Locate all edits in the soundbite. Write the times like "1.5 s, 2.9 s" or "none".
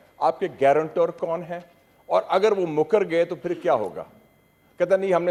none